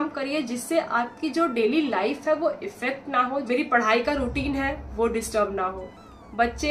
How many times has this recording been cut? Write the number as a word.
one